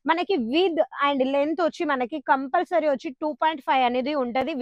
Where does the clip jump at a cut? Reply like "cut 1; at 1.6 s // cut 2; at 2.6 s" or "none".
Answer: none